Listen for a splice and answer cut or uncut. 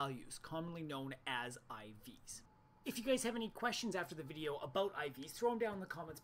uncut